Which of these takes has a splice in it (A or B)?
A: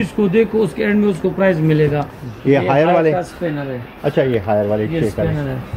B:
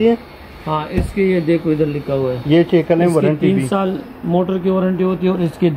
A